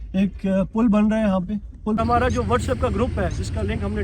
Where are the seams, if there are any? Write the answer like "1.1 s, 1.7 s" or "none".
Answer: 2.0 s